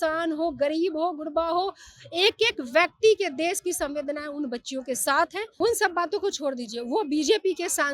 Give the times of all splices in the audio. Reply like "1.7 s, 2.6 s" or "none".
5.5 s

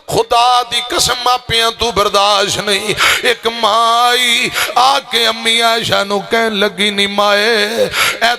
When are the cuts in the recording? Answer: none

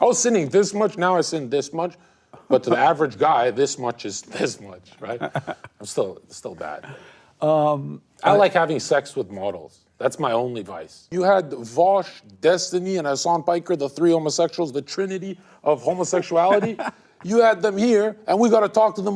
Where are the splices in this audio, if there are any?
11.1 s

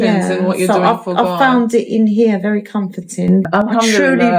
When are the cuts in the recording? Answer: 3.4 s

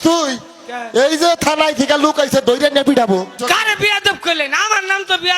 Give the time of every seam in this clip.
3.3 s

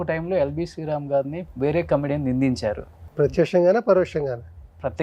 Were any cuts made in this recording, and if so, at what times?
1.4 s, 3.0 s

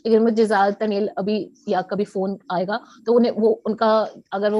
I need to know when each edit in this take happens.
none

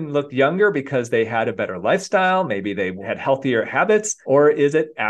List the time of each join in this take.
3.0 s, 4.1 s

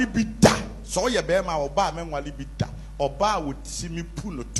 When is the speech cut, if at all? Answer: none

